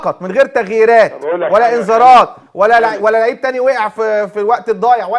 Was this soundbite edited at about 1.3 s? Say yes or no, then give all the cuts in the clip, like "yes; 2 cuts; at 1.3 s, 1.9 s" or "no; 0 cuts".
no; 1 cut; at 4.3 s